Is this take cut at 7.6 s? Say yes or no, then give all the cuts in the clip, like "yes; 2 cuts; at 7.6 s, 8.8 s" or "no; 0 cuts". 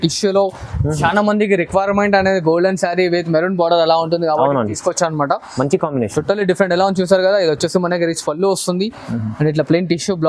no; 0 cuts